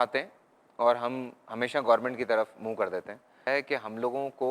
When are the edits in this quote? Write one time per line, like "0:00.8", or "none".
0:03.4